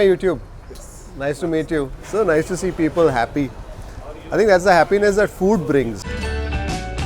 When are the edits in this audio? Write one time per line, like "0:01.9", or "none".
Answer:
0:02.0
0:06.0